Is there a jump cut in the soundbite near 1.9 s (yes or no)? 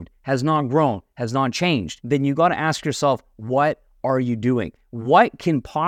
yes